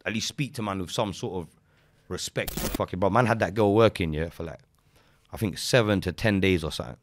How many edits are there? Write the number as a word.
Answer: one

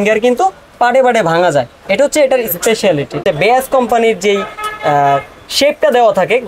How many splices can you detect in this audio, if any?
one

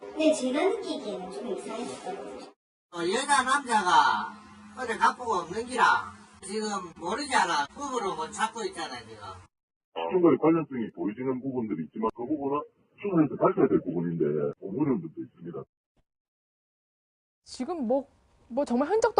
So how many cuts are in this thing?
zero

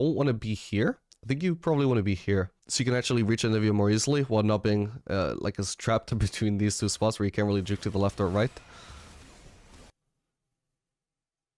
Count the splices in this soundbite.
one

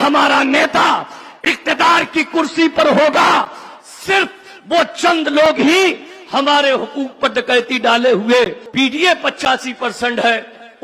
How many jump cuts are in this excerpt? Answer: one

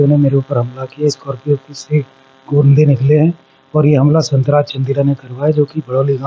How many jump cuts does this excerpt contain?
zero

